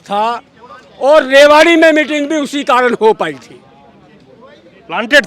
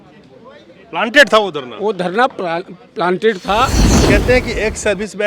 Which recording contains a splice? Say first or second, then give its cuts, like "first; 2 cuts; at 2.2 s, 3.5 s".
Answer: second; 1 cut; at 3.9 s